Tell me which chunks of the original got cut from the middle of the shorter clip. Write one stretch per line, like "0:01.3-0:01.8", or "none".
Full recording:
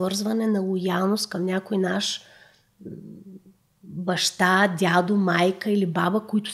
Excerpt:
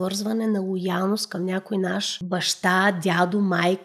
0:02.1-0:03.9